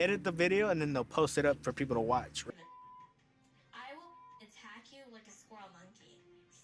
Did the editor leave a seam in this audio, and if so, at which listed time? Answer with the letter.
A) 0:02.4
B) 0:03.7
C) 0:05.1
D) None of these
A